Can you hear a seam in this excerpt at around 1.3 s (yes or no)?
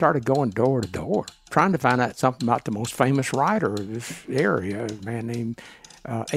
yes